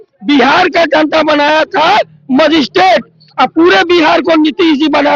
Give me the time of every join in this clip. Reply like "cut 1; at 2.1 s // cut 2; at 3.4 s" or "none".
none